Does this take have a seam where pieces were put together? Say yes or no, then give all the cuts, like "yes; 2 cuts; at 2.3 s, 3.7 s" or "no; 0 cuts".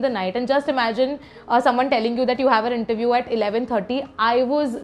no; 0 cuts